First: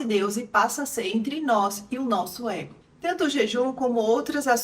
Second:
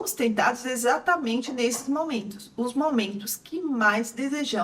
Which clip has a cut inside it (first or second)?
first